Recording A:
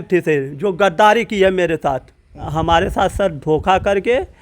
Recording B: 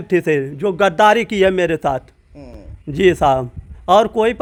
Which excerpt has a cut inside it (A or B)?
A